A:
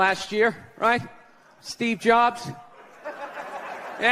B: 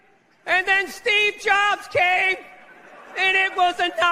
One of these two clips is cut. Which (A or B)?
B